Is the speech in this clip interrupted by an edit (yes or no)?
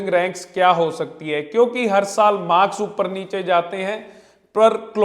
no